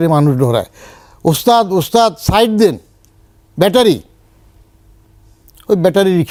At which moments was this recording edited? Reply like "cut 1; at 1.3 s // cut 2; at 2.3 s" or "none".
none